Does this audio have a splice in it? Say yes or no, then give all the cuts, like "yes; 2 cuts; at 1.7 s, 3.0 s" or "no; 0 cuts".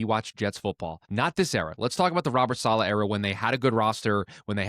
yes; 1 cut; at 0.9 s